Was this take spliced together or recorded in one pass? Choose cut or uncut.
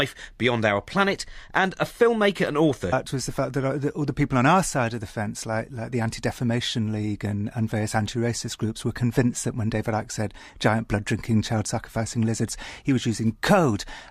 uncut